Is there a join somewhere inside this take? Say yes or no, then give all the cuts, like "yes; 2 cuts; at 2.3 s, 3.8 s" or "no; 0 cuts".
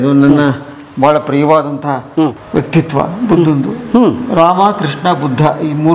no; 0 cuts